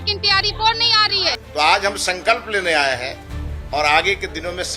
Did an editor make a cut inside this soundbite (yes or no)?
yes